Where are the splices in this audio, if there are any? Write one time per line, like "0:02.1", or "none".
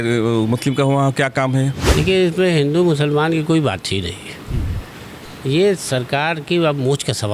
0:01.9